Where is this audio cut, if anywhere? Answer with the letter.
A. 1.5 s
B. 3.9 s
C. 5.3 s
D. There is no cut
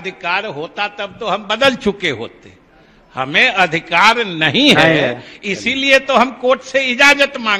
D